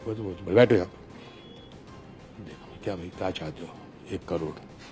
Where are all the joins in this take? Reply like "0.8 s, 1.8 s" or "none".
none